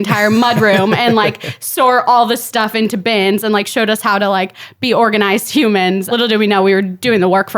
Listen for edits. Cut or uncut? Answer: cut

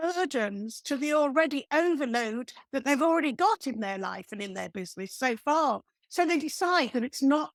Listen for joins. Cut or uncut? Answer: uncut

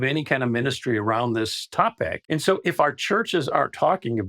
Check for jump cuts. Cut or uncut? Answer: cut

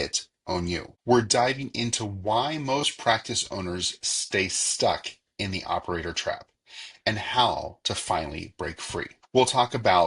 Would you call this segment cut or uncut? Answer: cut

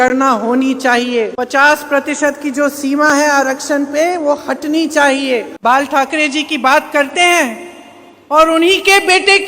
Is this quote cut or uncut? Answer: cut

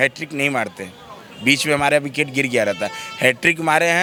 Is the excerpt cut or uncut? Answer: uncut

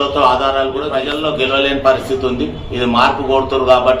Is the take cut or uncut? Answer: cut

